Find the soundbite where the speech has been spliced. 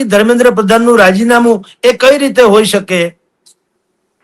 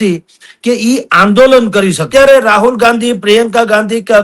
second; 1 cut; at 2.1 s

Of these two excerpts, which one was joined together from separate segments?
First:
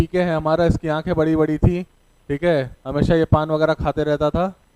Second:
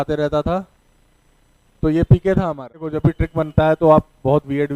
second; 1 cut; at 3.0 s

